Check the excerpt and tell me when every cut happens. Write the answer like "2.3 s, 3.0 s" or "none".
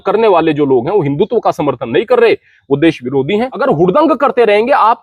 3.6 s

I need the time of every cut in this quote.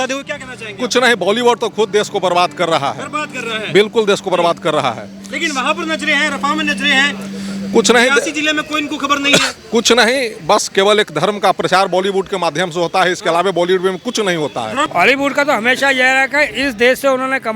14.9 s

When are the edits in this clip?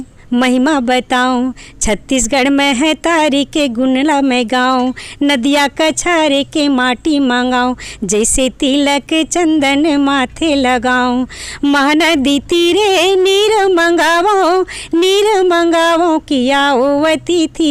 none

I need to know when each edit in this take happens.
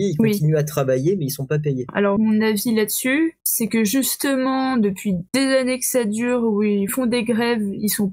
1.9 s, 3.5 s, 5.2 s, 6.9 s

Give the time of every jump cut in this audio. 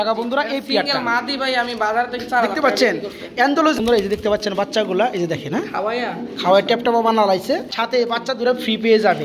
3.8 s, 7.7 s

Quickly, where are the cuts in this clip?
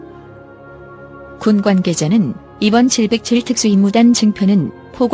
1.4 s

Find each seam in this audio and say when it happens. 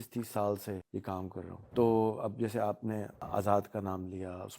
1.4 s, 3.2 s

